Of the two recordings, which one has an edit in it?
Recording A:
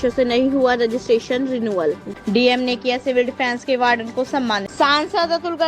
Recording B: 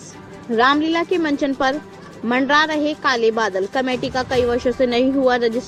A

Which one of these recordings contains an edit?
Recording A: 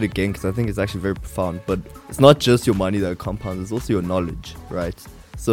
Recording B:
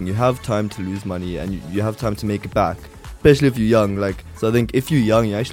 A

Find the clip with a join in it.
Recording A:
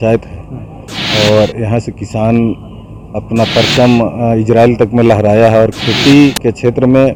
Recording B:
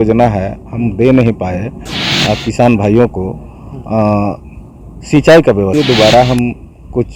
B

